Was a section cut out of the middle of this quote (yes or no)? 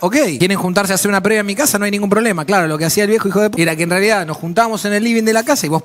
yes